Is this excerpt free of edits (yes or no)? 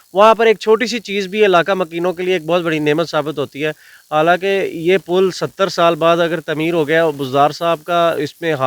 yes